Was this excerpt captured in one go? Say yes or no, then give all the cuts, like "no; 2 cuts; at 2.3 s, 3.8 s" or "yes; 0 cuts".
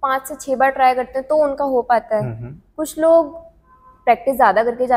yes; 0 cuts